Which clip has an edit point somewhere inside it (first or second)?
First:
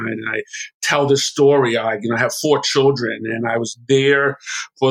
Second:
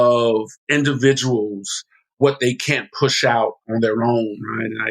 second